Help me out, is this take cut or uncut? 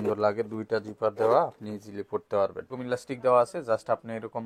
cut